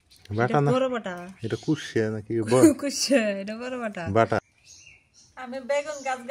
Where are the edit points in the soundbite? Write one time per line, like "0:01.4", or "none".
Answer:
0:04.5